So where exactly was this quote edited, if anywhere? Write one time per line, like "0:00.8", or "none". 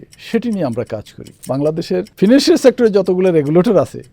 0:01.8